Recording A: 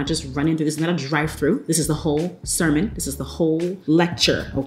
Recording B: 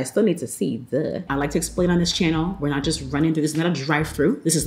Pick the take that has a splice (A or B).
B